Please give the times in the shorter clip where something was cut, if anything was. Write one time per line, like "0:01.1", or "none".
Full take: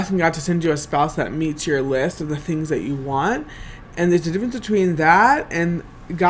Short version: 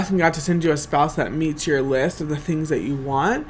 none